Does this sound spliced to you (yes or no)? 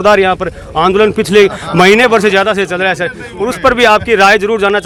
no